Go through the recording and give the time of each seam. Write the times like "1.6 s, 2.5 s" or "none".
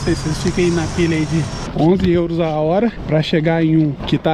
1.7 s